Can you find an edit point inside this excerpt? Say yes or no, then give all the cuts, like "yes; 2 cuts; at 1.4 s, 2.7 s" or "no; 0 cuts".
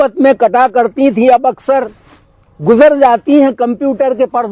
no; 0 cuts